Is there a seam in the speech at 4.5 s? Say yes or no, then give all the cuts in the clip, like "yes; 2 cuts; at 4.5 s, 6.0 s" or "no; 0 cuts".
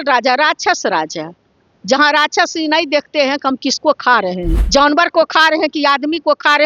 yes; 1 cut; at 4.5 s